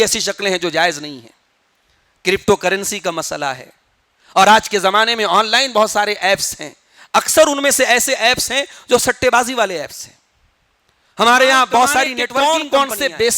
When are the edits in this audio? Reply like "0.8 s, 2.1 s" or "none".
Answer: 12.3 s